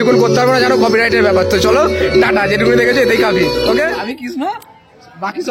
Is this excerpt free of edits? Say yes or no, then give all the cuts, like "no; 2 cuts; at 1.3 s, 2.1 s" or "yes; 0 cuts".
no; 1 cut; at 4.0 s